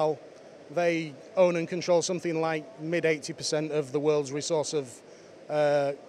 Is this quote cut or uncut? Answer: uncut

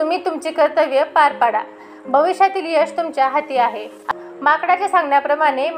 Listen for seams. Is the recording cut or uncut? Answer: cut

